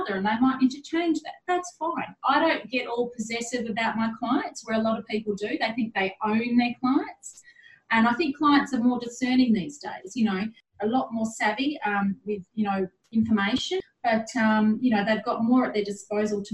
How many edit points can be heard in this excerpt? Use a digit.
2